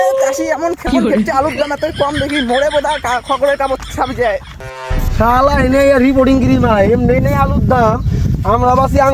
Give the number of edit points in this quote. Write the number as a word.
one